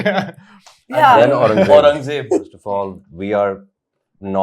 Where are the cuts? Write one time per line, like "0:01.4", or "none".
0:02.6